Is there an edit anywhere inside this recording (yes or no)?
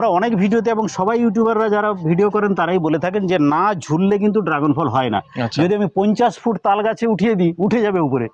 no